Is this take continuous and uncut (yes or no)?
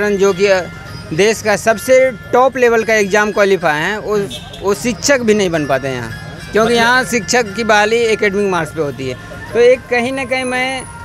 yes